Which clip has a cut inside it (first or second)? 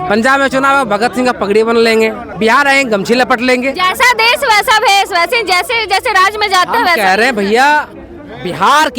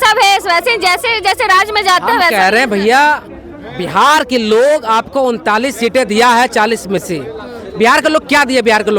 first